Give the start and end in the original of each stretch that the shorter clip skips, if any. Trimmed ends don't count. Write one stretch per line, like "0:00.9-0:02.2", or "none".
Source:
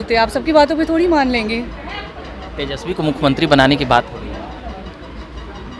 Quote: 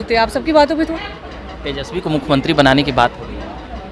0:00.9-0:01.8